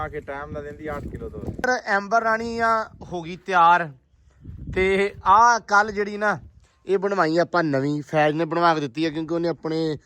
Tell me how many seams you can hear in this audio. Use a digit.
1